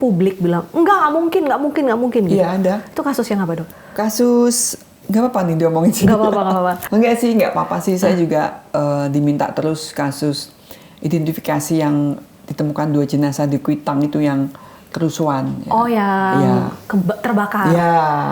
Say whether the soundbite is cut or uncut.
uncut